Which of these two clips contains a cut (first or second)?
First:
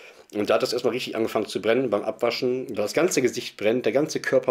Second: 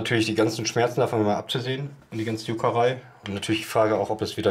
first